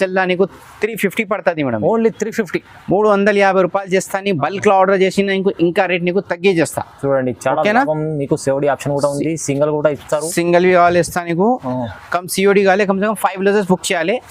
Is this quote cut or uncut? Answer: uncut